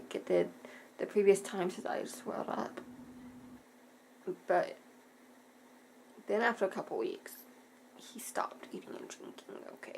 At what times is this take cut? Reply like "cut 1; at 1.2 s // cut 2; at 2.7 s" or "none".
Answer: cut 1; at 3.6 s